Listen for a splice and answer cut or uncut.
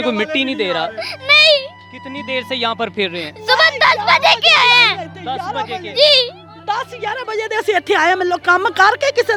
uncut